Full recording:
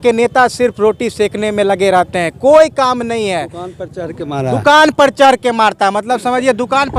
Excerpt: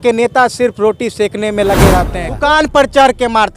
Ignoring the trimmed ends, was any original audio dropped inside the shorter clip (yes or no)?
yes